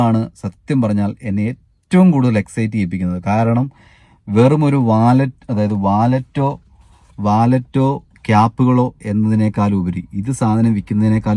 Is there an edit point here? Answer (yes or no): no